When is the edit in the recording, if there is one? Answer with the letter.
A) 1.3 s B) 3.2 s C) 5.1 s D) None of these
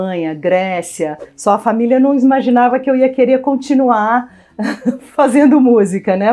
A